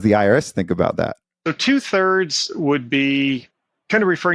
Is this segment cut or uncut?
cut